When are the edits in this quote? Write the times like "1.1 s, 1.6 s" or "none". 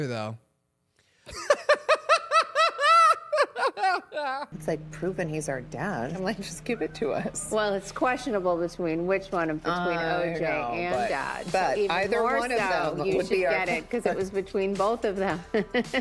none